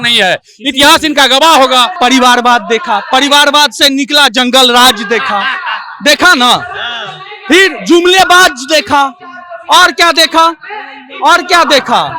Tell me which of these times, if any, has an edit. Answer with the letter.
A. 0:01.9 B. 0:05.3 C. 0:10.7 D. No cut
A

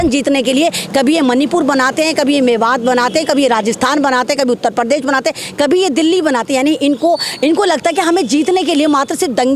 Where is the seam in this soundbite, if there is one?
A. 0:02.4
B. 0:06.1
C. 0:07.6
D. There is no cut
D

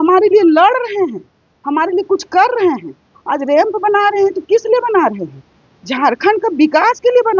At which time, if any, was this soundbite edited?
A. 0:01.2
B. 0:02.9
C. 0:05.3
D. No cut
D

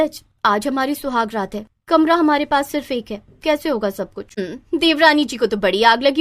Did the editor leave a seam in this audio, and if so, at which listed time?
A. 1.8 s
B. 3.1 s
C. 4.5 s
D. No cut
C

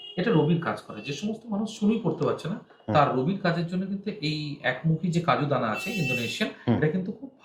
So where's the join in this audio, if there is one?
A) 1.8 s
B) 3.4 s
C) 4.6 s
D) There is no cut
D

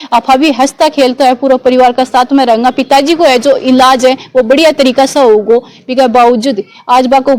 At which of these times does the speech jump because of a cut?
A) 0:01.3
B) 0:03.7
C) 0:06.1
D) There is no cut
D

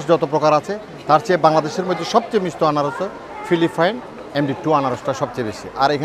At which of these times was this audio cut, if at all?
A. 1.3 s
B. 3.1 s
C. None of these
C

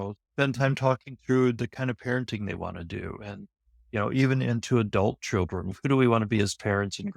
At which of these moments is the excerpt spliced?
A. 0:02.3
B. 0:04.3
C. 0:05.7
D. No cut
C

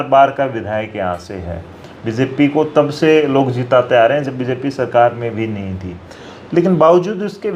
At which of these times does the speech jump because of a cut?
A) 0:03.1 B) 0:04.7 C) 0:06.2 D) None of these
D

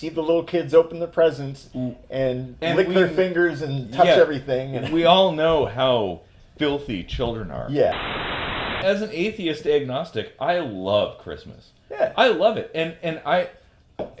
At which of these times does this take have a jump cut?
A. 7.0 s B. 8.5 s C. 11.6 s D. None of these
B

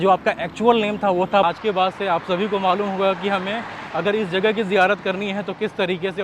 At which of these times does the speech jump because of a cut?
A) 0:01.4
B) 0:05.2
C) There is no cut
A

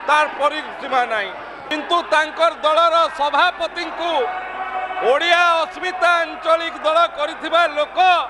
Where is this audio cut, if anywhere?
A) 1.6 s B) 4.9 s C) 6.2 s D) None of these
A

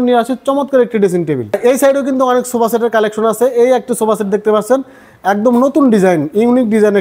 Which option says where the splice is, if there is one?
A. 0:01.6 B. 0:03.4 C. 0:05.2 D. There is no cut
A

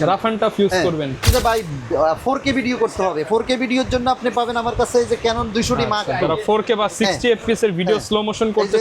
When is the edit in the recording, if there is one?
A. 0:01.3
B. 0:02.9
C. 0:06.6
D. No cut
A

